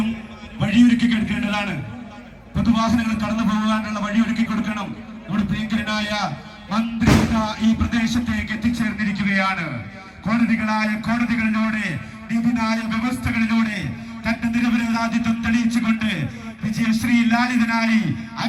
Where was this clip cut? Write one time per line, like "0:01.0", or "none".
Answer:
none